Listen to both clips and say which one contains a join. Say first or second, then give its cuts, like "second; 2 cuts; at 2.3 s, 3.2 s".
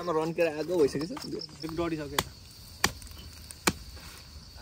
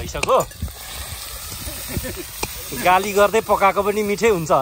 first; 1 cut; at 1.6 s